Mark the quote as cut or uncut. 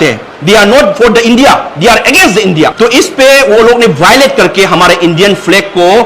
cut